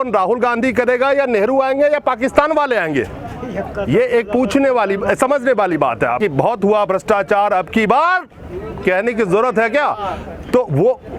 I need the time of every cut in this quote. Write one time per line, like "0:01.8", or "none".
0:06.2